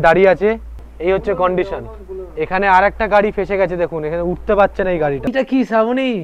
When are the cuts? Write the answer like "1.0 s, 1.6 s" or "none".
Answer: 5.3 s